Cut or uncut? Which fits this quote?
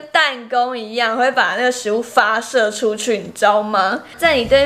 uncut